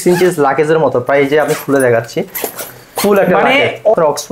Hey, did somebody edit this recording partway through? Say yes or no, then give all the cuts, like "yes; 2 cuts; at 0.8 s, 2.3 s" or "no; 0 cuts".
no; 0 cuts